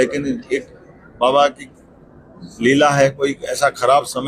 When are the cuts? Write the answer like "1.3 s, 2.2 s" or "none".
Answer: none